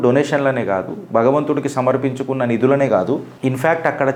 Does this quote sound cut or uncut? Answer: uncut